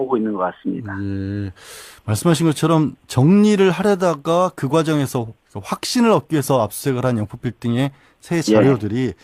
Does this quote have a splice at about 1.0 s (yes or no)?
yes